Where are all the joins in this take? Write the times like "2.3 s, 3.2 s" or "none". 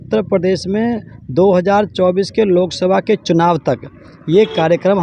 none